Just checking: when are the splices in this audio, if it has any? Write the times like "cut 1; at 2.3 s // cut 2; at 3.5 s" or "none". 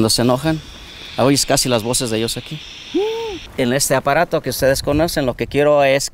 cut 1; at 3.4 s

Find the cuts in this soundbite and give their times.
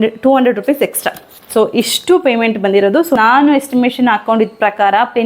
cut 1; at 3.2 s

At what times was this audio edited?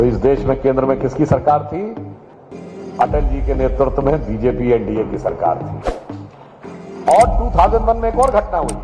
none

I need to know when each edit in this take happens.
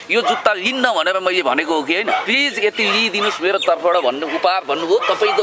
cut 1; at 2.2 s

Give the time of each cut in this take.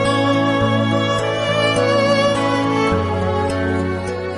none

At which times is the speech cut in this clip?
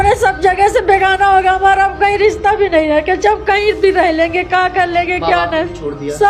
none

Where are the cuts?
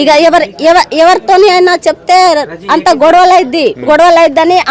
cut 1; at 3.8 s

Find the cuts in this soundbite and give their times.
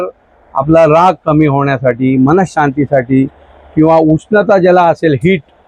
none

